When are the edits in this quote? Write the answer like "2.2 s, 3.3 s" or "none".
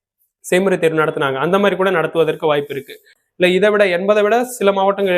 3.2 s